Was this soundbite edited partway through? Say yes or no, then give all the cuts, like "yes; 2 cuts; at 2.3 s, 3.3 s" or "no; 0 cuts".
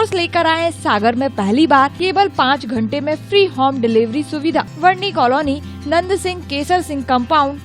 yes; 2 cuts; at 1.9 s, 4.7 s